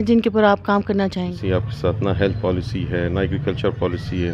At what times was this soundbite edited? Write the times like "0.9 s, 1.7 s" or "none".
1.4 s

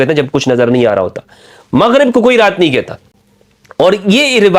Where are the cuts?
none

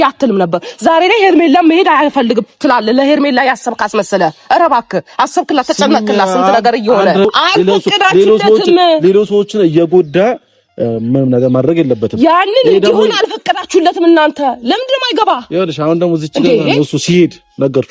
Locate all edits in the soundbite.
7.3 s

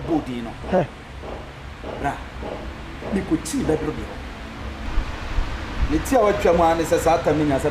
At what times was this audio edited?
4.8 s

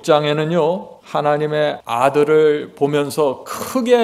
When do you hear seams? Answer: 0.9 s, 1.8 s

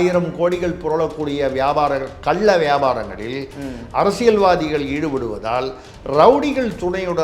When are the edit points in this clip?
none

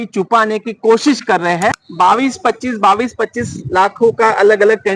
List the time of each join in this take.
1.8 s

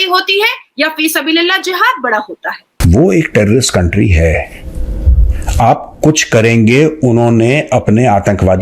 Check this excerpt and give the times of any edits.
2.7 s

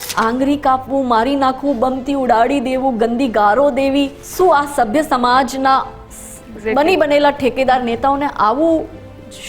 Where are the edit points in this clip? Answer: 4.2 s

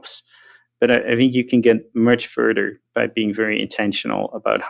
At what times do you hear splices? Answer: none

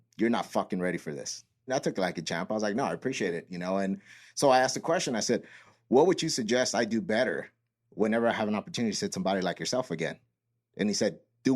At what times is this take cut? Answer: 1.7 s

